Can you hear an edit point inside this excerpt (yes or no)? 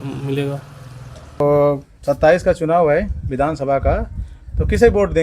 yes